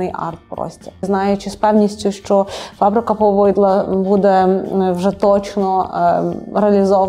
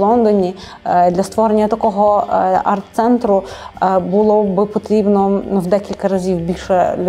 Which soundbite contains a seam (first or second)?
first